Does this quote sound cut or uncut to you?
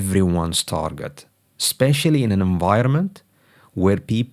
uncut